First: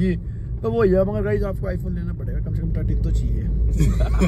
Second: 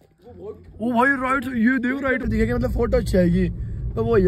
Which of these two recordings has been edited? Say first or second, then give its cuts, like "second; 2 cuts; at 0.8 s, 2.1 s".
second; 1 cut; at 2.3 s